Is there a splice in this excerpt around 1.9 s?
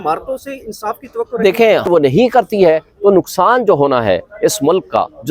yes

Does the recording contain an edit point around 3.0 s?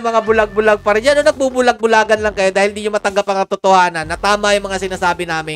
no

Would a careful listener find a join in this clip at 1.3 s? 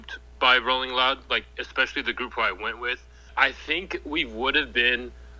no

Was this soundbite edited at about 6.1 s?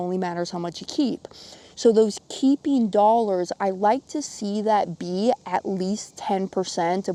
no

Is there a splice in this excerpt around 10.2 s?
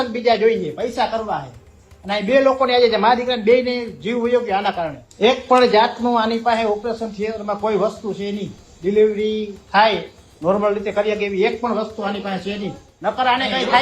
no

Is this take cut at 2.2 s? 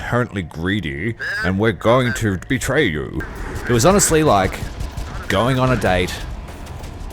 no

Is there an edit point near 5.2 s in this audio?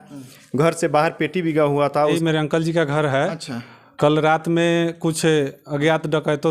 no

